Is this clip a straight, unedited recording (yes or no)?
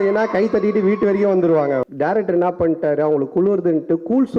no